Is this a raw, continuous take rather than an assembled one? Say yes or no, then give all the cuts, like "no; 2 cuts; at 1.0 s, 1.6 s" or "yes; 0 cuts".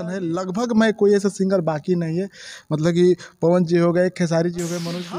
yes; 0 cuts